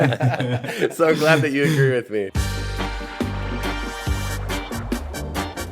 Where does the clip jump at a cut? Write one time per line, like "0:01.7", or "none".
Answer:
0:02.4